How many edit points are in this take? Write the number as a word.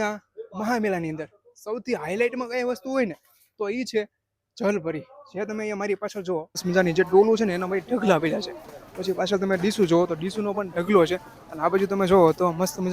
one